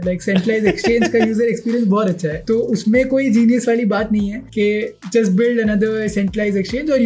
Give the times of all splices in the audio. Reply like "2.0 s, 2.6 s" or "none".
none